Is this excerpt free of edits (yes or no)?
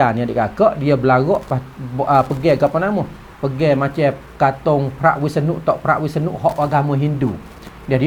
yes